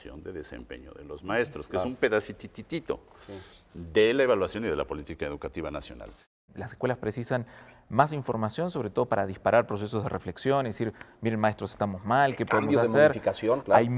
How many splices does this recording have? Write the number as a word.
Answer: one